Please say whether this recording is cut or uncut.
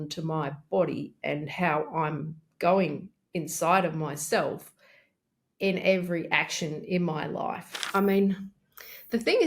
cut